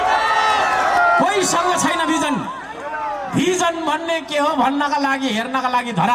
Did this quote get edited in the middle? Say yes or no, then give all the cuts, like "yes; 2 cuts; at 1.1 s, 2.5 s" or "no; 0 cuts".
no; 0 cuts